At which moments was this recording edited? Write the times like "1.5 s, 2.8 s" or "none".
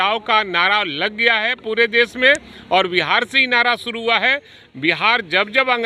none